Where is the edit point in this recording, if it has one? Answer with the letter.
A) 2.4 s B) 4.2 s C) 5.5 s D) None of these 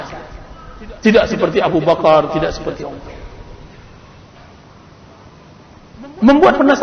B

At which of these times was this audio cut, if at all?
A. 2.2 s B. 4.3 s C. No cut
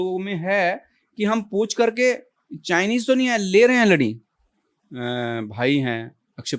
B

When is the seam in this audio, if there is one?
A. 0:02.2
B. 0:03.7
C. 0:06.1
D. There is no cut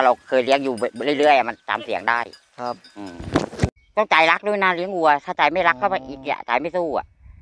B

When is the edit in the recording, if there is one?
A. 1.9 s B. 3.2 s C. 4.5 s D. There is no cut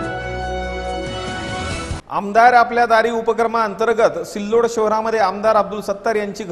A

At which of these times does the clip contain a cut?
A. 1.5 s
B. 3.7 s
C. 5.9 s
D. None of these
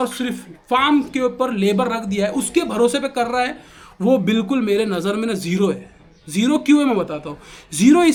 D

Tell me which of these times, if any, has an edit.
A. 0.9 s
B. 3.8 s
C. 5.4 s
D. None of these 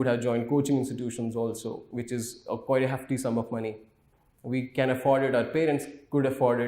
D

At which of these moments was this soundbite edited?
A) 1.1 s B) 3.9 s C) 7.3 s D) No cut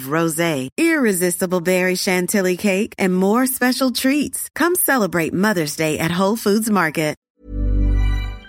C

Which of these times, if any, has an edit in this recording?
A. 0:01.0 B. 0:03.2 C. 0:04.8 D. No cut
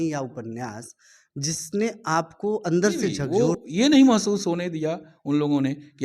B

